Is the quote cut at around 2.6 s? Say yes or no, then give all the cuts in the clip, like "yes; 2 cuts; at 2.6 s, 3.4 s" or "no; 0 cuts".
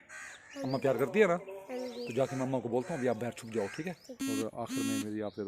no; 1 cut; at 4.2 s